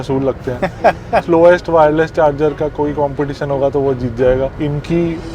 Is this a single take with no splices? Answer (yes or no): no